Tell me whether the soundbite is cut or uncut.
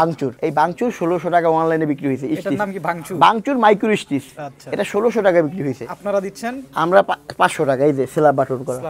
uncut